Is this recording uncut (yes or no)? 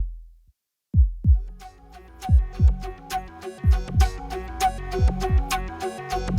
no